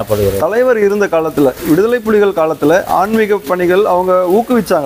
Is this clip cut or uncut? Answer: uncut